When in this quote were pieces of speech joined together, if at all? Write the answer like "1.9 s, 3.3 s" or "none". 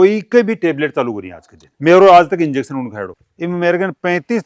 1.7 s, 3.0 s

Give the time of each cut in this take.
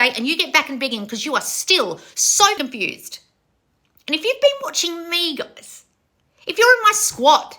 2.6 s

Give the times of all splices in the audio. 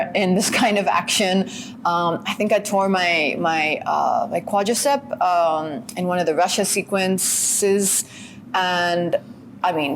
none

